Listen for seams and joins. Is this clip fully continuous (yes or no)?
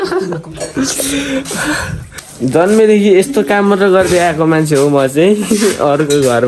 no